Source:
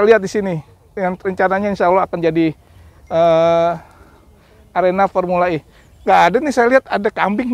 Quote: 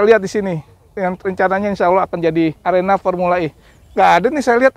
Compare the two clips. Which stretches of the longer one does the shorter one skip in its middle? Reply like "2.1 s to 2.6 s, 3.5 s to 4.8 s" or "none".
2.6 s to 4.7 s